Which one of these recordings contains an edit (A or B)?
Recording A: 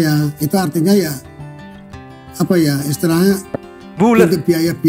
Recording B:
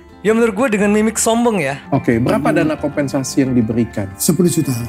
B